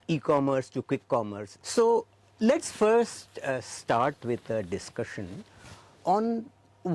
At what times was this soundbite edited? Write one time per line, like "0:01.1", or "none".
none